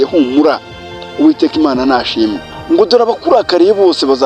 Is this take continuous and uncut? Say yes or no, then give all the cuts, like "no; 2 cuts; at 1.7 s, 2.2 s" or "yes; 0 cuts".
no; 1 cut; at 2.5 s